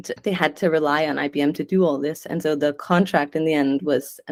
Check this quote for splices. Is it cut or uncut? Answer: uncut